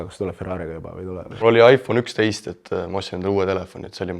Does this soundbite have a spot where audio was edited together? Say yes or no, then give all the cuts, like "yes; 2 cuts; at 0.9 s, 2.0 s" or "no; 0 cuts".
yes; 1 cut; at 1.3 s